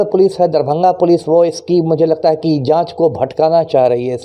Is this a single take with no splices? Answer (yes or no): yes